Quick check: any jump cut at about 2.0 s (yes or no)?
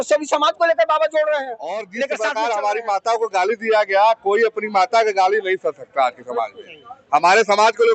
yes